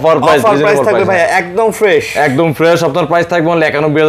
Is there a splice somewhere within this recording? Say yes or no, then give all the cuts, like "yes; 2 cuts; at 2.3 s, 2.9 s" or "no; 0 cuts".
no; 0 cuts